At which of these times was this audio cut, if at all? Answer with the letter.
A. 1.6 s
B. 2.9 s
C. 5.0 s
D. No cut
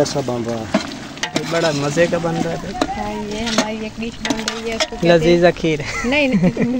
D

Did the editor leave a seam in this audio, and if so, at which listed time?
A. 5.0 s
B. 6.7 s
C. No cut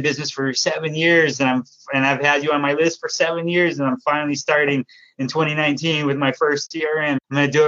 B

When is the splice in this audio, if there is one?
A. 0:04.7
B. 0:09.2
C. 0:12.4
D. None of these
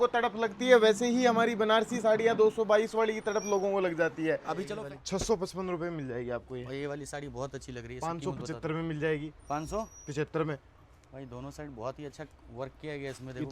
A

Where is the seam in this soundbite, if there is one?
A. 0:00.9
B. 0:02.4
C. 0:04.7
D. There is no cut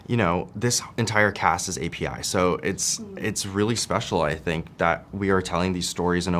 D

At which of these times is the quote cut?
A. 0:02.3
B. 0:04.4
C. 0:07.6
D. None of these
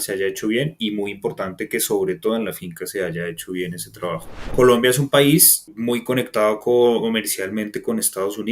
B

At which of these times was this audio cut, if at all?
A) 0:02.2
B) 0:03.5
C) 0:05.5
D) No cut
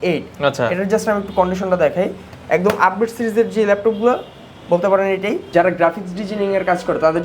C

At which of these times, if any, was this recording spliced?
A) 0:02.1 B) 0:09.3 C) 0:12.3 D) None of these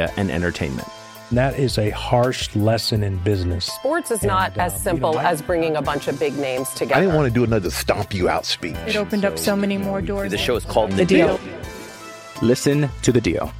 D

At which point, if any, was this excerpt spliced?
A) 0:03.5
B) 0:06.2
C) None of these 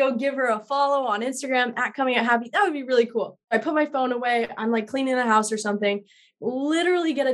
A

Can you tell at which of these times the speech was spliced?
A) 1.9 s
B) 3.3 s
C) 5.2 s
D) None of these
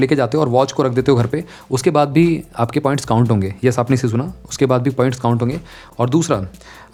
D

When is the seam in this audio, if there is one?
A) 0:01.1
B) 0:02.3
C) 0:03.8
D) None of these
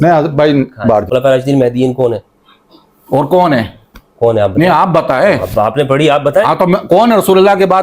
A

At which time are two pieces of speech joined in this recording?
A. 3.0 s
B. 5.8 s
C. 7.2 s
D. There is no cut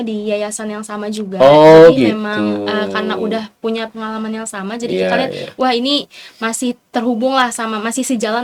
D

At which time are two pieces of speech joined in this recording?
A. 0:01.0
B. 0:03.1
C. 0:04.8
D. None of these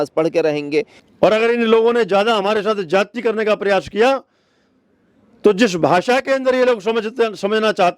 A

